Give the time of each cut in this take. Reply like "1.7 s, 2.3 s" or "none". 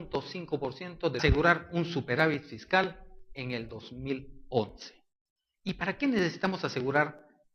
none